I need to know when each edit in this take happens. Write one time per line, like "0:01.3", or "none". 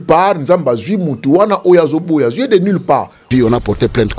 0:03.3